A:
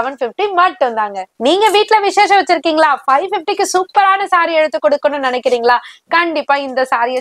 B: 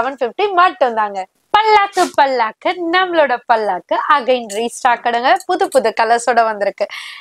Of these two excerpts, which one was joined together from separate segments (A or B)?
A